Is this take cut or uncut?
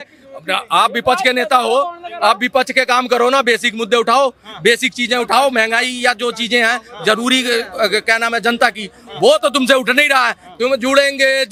uncut